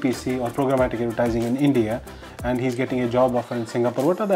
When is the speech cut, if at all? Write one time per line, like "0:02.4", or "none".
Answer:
none